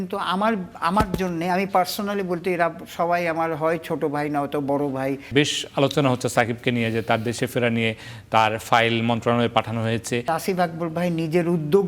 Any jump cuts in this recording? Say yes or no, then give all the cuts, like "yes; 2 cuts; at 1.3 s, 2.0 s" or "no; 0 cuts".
yes; 2 cuts; at 5.3 s, 10.3 s